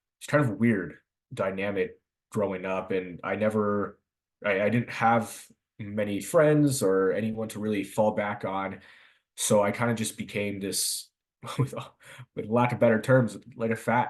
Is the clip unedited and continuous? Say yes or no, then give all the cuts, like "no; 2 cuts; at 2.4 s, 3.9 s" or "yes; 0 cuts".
no; 1 cut; at 11.1 s